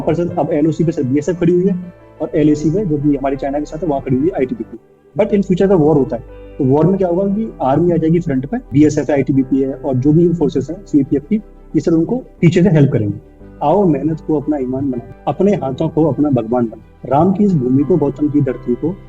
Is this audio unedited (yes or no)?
no